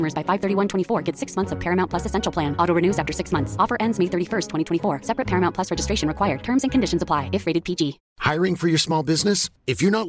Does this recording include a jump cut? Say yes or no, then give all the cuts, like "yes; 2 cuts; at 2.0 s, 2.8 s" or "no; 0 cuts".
yes; 1 cut; at 8.1 s